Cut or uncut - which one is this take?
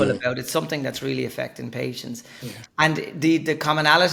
uncut